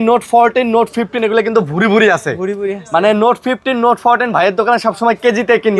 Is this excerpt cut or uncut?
uncut